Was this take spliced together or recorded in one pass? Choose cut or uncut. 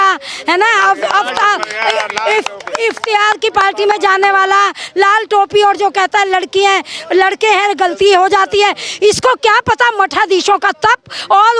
uncut